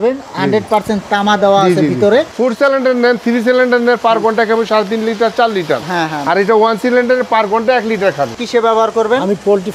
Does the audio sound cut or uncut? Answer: cut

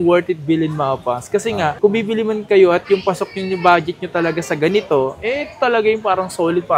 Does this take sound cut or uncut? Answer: uncut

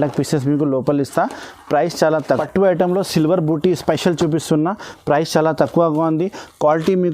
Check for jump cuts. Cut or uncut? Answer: cut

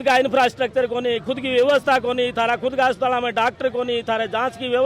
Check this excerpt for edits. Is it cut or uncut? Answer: uncut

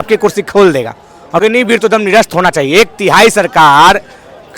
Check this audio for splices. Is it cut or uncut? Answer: cut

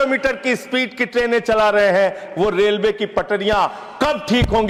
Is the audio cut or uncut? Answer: uncut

